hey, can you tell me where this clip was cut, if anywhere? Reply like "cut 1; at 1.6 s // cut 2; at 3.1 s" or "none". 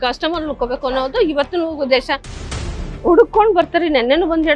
cut 1; at 2.4 s